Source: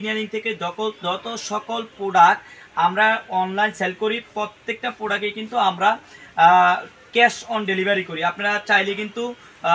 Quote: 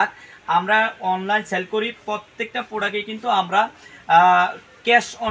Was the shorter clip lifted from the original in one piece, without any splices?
yes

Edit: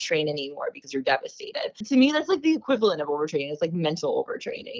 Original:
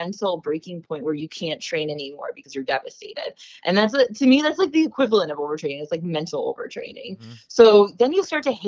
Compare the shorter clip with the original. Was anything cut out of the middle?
yes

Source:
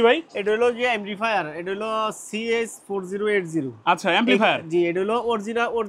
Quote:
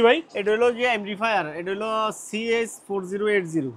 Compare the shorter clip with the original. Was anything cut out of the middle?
no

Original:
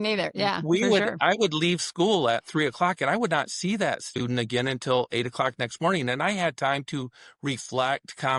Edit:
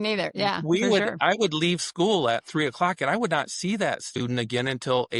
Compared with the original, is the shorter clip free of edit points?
yes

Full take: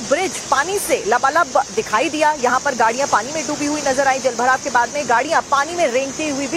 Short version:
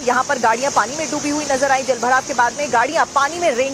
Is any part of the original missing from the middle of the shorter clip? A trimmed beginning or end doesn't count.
no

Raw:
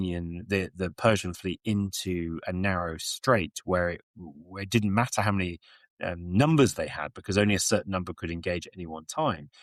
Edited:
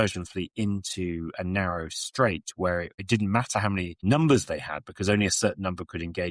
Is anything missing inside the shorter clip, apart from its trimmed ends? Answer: yes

